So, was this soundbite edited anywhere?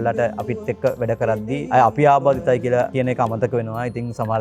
yes; 2 cuts; at 1.6 s, 2.9 s

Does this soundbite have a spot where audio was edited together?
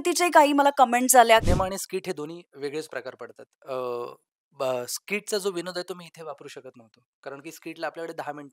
yes; 1 cut; at 1.4 s

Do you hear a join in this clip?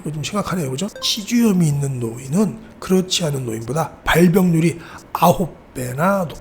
yes; 1 cut; at 1.1 s

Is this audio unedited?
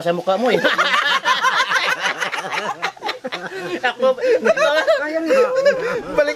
yes; 0 cuts

